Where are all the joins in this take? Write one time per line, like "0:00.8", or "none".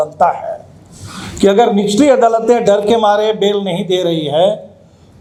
none